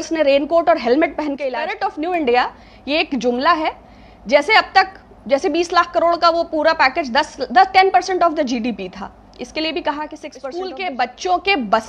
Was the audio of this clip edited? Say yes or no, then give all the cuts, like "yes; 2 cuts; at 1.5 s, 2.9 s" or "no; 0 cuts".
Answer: yes; 2 cuts; at 1.7 s, 10.3 s